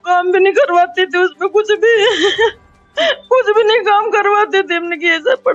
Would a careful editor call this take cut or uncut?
uncut